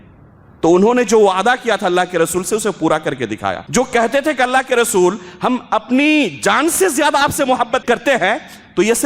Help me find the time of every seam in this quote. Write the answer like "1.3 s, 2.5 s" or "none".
3.6 s, 7.8 s